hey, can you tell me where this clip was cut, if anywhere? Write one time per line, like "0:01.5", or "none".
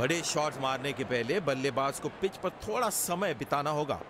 none